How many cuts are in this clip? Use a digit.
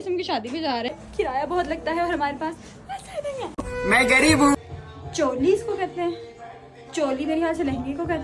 2